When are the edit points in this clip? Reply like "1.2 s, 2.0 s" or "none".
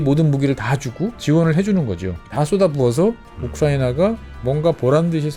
1.2 s

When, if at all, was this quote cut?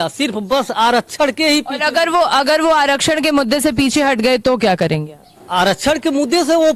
none

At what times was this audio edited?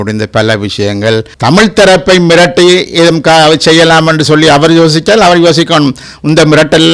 1.3 s

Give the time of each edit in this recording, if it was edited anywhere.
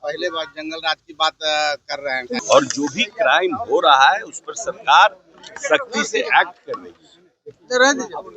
2.3 s

